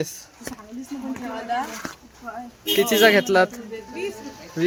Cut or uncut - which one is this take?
uncut